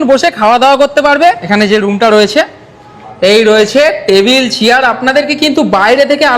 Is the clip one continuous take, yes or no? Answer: no